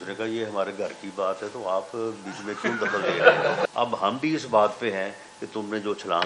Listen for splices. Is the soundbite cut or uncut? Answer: cut